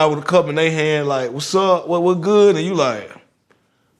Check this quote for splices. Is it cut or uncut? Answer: uncut